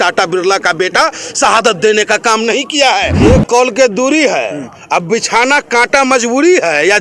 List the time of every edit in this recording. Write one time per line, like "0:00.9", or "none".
0:03.2